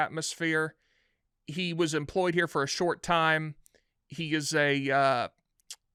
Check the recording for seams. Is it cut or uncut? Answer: uncut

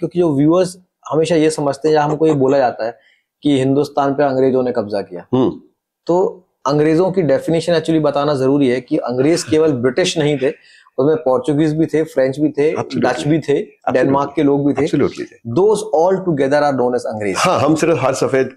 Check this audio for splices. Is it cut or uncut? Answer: uncut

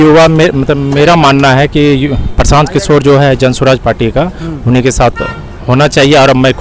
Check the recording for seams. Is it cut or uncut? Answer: uncut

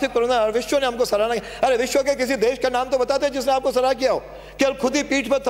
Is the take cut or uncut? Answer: uncut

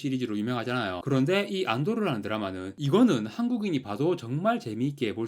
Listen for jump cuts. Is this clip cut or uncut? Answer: cut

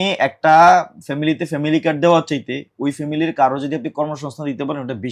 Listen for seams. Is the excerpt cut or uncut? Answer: uncut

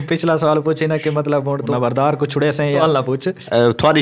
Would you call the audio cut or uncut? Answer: cut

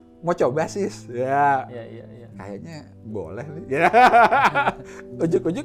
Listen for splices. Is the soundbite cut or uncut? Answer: uncut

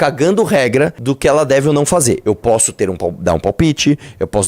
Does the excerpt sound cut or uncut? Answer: cut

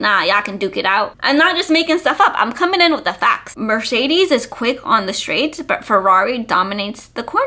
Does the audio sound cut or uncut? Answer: cut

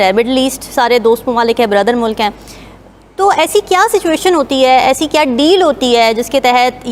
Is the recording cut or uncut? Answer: uncut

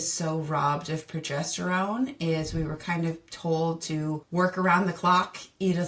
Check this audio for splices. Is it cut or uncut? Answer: cut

